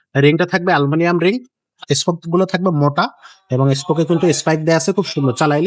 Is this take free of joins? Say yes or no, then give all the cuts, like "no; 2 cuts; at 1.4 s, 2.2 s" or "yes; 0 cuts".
yes; 0 cuts